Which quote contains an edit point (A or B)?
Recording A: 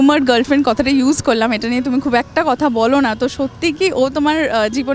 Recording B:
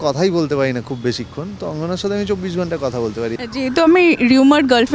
B